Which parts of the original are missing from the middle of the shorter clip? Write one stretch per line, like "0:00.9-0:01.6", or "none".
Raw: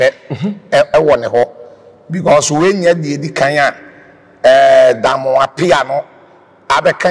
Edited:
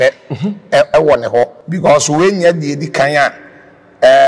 0:01.6-0:02.0